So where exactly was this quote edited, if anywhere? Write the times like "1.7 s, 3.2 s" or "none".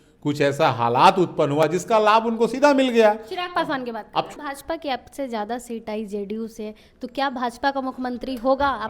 4.3 s